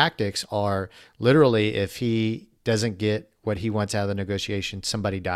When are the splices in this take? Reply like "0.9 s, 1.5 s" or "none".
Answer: none